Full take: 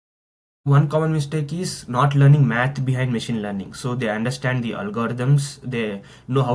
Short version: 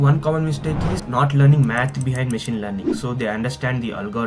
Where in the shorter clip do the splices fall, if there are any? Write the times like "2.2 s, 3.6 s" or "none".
1.0 s